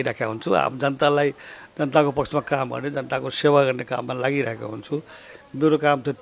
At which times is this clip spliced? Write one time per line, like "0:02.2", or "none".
none